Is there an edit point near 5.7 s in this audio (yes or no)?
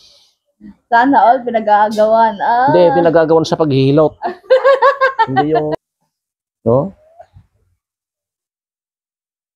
yes